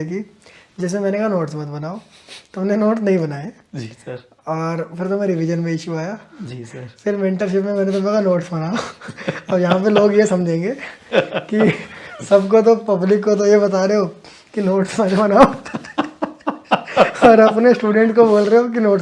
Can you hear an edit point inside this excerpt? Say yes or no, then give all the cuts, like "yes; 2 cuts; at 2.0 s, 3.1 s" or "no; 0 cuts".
no; 0 cuts